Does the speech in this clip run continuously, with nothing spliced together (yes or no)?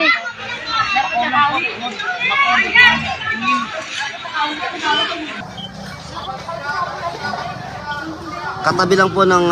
no